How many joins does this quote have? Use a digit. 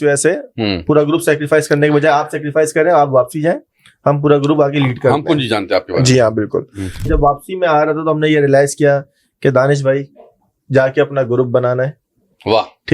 1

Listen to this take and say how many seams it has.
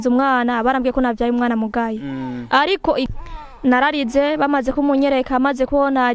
1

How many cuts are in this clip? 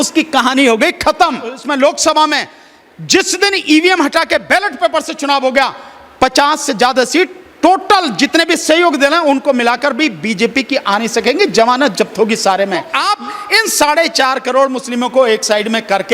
2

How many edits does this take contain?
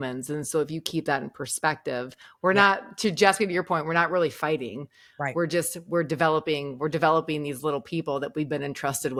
0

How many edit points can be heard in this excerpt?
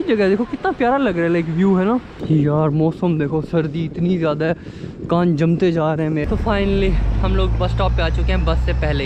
2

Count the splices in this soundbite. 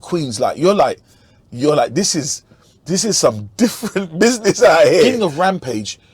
1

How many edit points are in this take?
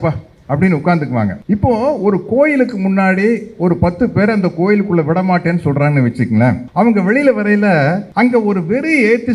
3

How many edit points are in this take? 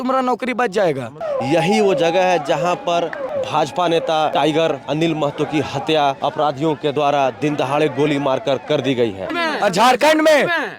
5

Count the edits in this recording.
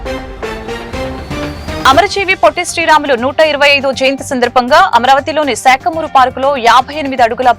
1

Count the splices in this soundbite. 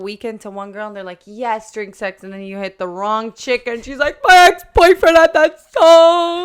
0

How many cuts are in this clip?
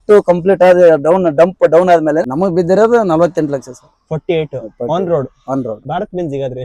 2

